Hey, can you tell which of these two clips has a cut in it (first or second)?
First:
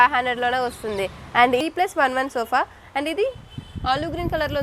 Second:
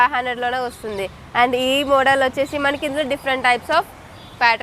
first